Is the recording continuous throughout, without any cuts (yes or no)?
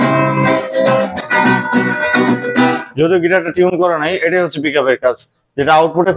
yes